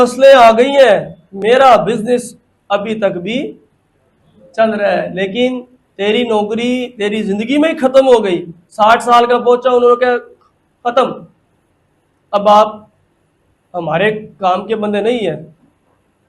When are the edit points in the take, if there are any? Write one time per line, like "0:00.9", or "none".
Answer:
none

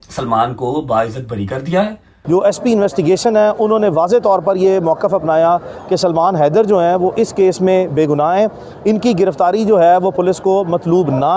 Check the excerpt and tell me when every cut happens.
0:02.1

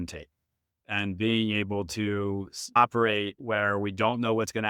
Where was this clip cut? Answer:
0:02.8

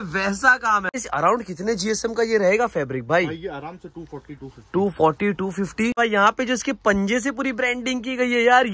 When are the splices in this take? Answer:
0:01.0
0:06.0

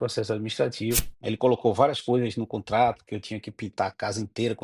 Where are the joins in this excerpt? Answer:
0:01.1

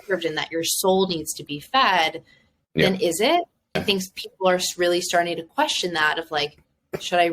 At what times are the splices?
0:03.8

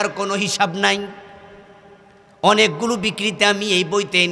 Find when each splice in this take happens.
none

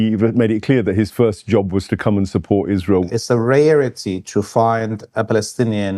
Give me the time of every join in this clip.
0:03.1

